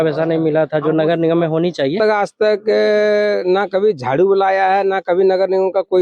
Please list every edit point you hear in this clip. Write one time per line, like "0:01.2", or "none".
0:02.0